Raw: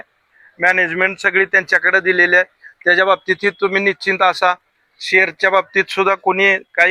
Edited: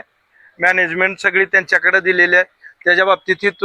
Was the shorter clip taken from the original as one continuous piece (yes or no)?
yes